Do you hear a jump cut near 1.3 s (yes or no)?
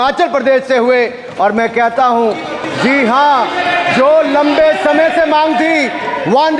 no